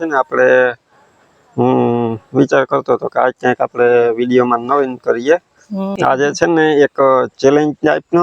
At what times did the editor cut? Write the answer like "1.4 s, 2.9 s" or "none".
5.9 s